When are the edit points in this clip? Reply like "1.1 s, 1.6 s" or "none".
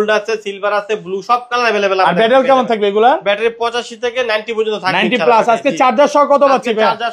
none